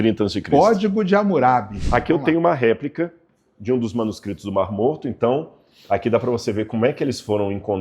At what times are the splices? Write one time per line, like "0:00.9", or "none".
0:01.8